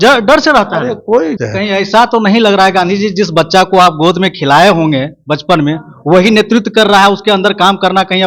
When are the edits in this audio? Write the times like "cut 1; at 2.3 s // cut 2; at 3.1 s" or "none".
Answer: cut 1; at 1.3 s